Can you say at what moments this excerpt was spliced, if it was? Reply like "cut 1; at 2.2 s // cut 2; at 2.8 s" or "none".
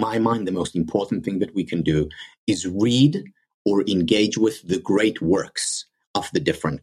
none